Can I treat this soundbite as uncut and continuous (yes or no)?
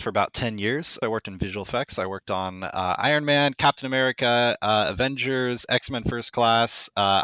no